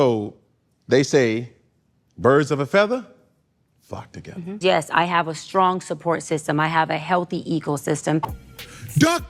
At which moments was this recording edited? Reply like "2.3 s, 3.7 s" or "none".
4.6 s, 8.4 s